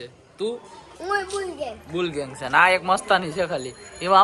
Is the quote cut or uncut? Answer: uncut